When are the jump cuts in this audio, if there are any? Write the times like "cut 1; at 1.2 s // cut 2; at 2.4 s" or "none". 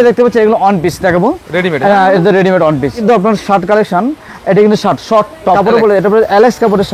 cut 1; at 3.0 s // cut 2; at 5.6 s